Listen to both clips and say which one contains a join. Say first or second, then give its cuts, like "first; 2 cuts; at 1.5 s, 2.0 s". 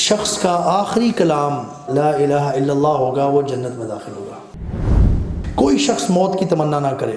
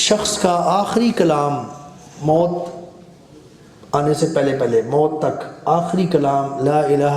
first; 2 cuts; at 1.8 s, 4.9 s